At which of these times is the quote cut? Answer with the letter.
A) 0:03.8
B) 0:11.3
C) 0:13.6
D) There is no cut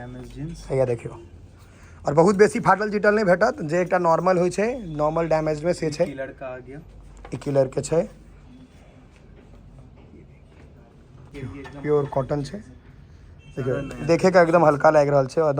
B